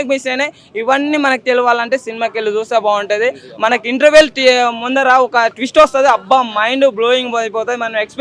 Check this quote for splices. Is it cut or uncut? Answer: uncut